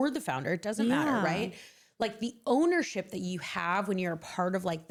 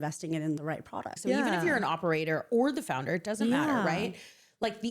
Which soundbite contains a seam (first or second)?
second